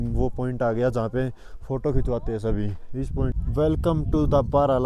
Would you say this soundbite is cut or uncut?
cut